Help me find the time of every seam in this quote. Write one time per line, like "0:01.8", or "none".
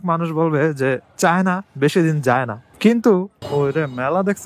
0:03.3